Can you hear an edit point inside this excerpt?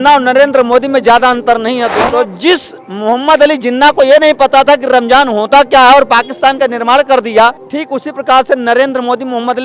yes; 2 cuts; at 1.9 s, 7.7 s

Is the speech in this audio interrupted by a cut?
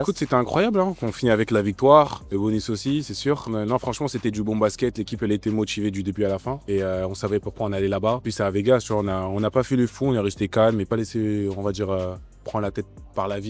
yes; 5 cuts; at 2.2 s, 3.5 s, 6.5 s, 8.3 s, 10.9 s

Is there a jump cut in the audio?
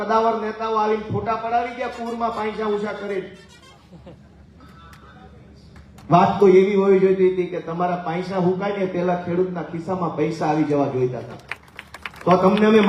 no; 0 cuts

